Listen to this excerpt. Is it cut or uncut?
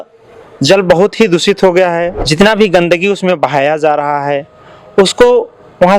cut